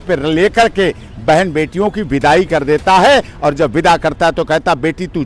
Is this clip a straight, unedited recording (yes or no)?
yes